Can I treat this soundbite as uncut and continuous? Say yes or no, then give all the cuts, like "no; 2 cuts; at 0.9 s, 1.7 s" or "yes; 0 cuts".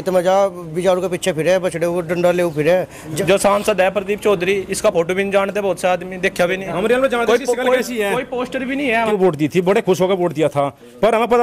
no; 2 cuts; at 3.0 s, 9.1 s